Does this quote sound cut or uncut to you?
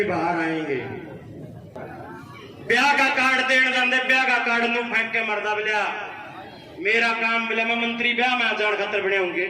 cut